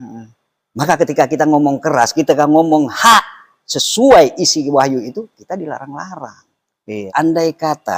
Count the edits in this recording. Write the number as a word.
one